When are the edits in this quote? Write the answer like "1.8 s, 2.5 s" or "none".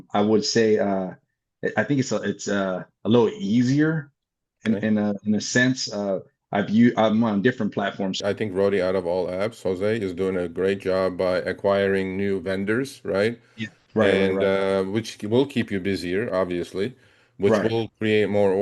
8.2 s